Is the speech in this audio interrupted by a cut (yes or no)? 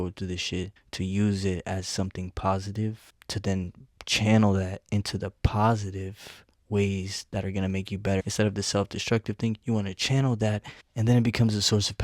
yes